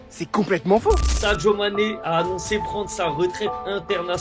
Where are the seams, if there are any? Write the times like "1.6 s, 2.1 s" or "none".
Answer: 1.1 s